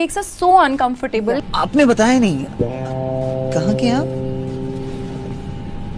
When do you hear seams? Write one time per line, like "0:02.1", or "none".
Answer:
0:01.4